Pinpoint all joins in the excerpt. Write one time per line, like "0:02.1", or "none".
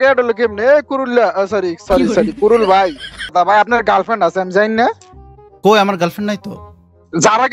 0:03.3